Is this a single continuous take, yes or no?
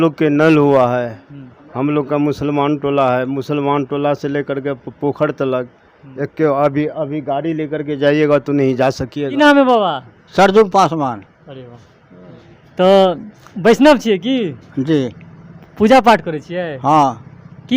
no